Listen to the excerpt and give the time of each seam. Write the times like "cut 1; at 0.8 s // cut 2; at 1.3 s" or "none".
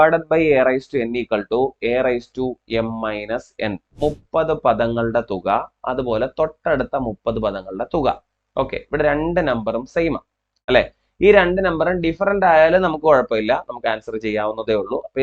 cut 1; at 3.9 s